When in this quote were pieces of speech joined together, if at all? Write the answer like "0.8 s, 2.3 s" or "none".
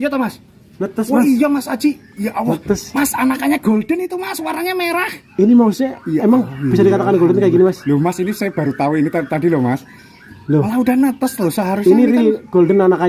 none